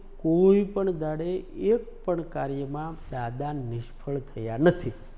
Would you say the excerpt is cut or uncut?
uncut